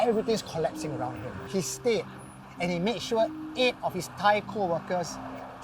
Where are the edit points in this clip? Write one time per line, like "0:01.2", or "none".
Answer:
0:01.4